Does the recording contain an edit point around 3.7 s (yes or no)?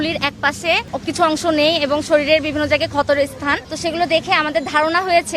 yes